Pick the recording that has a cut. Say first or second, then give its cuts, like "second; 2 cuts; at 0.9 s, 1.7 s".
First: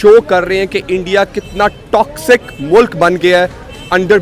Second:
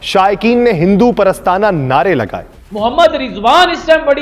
second; 1 cut; at 2.7 s